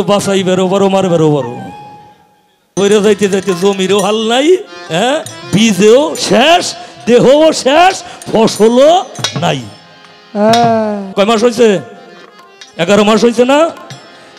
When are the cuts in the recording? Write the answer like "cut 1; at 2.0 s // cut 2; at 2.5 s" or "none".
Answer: cut 1; at 2.8 s // cut 2; at 11.0 s